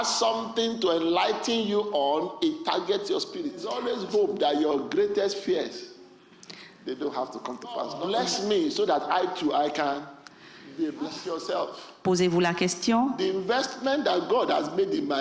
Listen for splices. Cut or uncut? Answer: cut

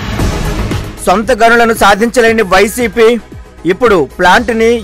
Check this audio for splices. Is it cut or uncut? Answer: cut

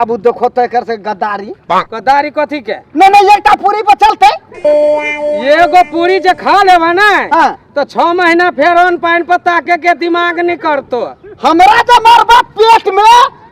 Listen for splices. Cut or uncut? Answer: cut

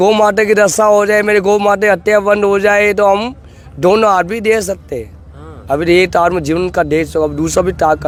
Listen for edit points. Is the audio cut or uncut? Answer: uncut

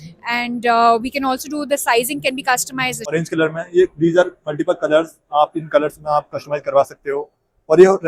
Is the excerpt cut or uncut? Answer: cut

